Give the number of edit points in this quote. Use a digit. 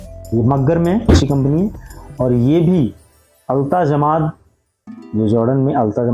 1